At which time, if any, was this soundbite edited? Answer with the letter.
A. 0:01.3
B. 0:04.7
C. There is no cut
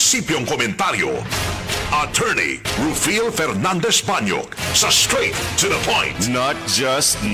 C